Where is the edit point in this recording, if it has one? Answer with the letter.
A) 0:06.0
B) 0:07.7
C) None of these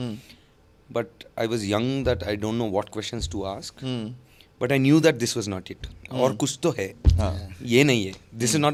C